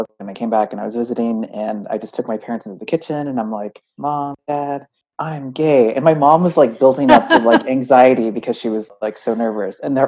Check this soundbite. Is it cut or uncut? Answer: uncut